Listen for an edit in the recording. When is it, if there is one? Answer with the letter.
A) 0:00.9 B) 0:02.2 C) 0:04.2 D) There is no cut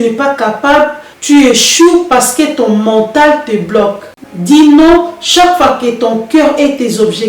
C